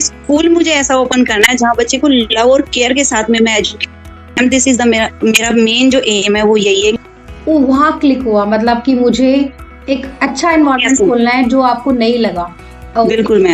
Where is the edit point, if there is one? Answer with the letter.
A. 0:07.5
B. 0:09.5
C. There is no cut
C